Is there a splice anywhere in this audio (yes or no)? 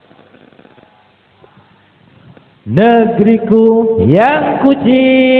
no